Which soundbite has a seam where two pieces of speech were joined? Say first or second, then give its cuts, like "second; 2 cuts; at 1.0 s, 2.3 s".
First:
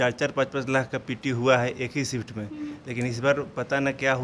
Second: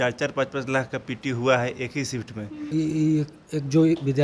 second; 1 cut; at 2.6 s